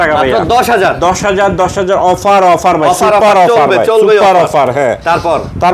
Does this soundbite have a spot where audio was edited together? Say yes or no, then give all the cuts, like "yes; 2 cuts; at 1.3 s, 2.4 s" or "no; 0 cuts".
no; 0 cuts